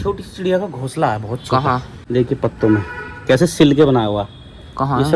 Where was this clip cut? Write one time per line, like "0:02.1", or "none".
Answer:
none